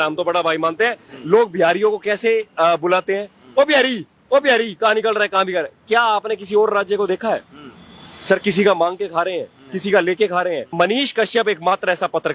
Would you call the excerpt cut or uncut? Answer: cut